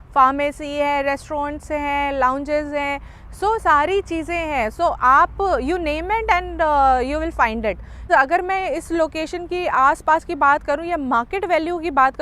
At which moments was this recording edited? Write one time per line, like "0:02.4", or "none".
0:08.0